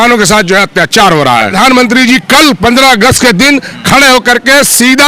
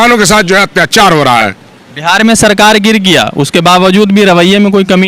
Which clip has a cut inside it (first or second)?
first